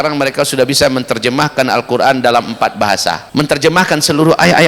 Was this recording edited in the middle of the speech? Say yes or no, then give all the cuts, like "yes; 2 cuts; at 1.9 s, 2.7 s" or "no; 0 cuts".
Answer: yes; 1 cut; at 3.2 s